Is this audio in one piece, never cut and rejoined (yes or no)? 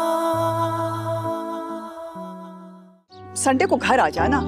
no